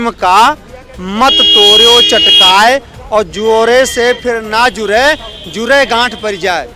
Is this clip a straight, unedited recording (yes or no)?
yes